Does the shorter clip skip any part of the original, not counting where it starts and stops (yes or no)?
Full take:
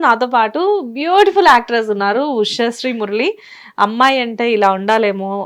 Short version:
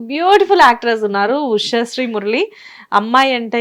no